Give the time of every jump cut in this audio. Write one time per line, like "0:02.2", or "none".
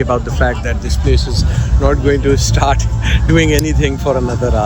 none